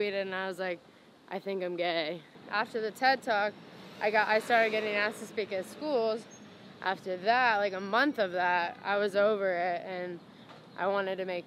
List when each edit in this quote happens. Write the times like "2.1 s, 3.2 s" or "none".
2.3 s